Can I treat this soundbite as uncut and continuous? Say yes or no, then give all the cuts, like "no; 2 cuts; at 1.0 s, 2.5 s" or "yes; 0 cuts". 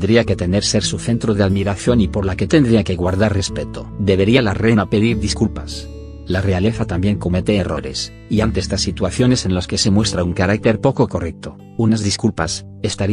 yes; 0 cuts